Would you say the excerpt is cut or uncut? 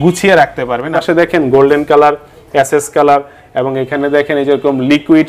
cut